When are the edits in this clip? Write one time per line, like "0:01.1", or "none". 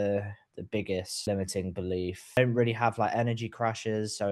0:01.3
0:02.4